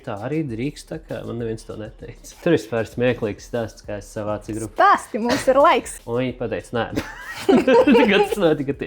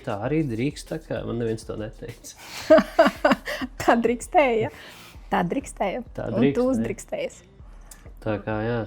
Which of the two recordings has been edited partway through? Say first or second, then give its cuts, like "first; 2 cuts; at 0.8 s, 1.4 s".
first; 2 cuts; at 2.4 s, 5.9 s